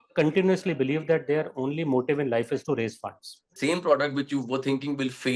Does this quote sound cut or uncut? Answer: cut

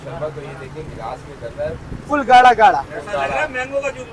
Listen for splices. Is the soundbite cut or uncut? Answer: uncut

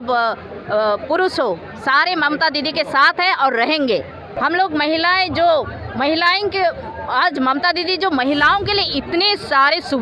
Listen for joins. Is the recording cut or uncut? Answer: cut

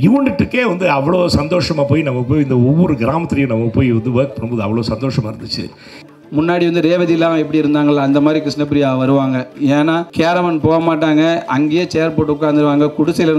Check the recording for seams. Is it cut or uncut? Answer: cut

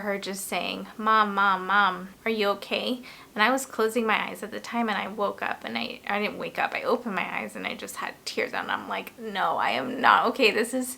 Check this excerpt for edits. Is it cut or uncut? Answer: uncut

